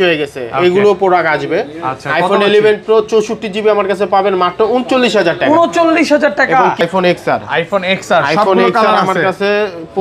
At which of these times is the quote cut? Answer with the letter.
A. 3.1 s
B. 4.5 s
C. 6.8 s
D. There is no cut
C